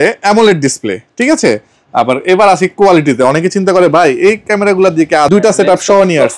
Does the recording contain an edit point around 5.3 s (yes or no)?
yes